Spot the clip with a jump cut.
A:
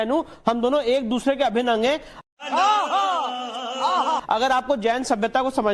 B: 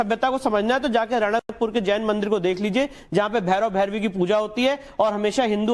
A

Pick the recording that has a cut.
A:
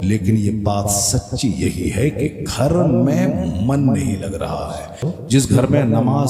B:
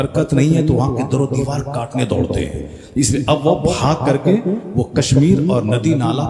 A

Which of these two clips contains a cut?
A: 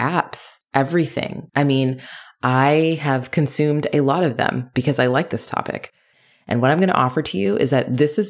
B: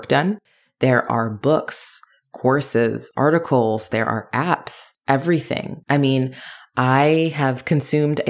A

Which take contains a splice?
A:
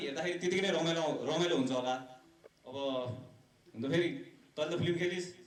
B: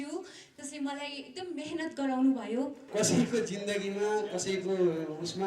B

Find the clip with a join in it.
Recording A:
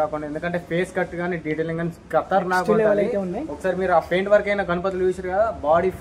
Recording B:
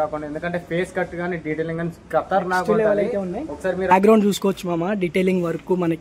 B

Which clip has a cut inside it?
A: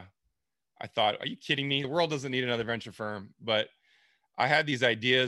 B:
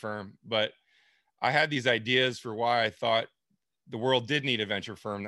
A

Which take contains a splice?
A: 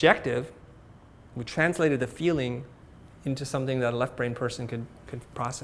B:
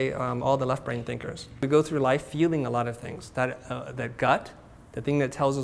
B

